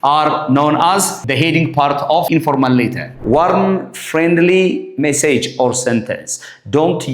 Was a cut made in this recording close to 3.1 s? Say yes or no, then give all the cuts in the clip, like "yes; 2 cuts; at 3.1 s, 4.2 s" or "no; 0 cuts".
yes; 3 cuts; at 1.2 s, 2.3 s, 3.1 s